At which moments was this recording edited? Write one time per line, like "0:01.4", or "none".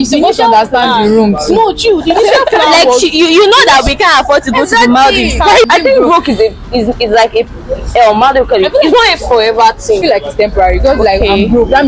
0:05.6
0:10.0